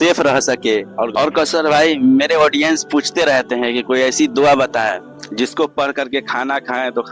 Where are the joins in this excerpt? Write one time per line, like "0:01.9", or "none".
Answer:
0:01.1